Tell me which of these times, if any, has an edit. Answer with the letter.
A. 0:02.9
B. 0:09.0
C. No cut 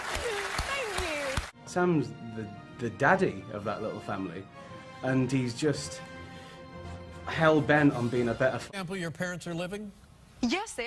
C